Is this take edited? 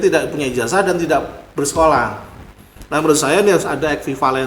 no; 0 cuts

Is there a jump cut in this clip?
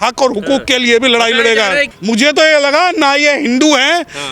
yes; 1 cut; at 1.9 s

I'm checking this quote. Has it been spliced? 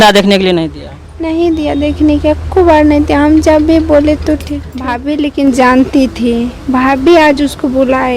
yes; 1 cut; at 5.0 s

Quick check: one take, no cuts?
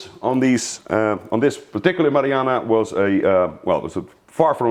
yes; 0 cuts

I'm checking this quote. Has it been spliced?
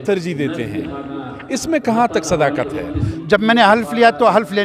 yes; 1 cut; at 3.1 s

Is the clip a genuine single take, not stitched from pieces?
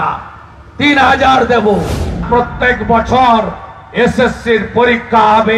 no; 1 cut; at 2.2 s

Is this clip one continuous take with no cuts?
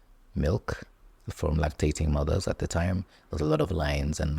yes; 0 cuts

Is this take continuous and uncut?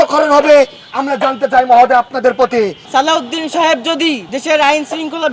no; 2 cuts; at 2.8 s, 4.3 s

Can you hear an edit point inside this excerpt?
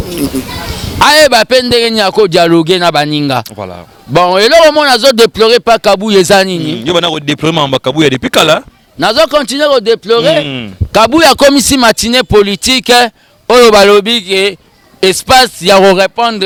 no; 0 cuts

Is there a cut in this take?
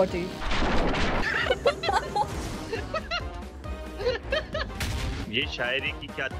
yes; 1 cut; at 5.2 s

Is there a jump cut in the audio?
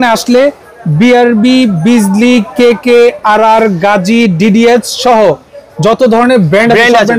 no; 0 cuts

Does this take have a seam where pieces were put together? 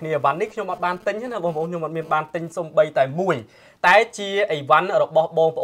no; 0 cuts

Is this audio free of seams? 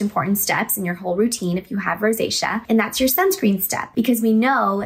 yes; 0 cuts

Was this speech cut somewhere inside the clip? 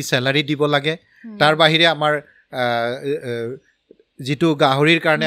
no; 0 cuts

